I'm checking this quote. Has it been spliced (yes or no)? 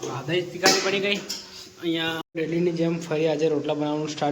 yes